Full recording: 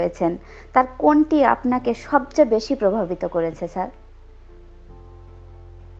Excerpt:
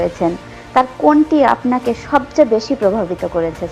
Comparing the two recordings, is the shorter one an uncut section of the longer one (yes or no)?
yes